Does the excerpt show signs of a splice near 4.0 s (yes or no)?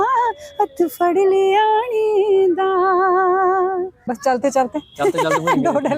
yes